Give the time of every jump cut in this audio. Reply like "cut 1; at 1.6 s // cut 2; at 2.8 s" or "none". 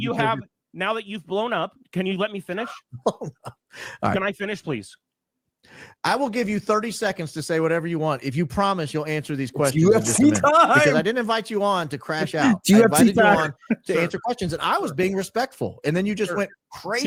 none

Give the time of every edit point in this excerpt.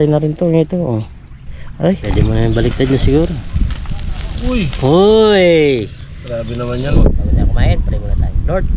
cut 1; at 2.0 s // cut 2; at 6.9 s

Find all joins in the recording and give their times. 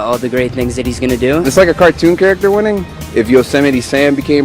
cut 1; at 1.4 s // cut 2; at 2.9 s

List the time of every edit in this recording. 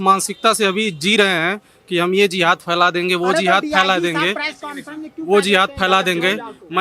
none

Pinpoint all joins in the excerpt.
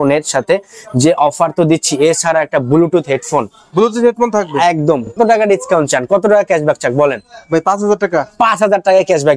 cut 1; at 5.2 s

